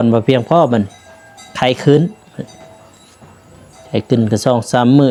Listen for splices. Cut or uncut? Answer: uncut